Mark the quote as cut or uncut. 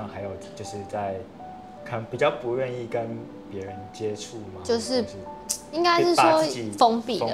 uncut